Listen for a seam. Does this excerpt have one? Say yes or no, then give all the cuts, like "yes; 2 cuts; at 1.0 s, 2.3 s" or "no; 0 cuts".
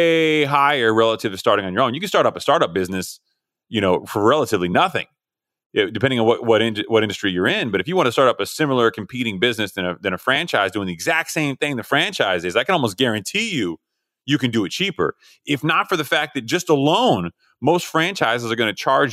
no; 0 cuts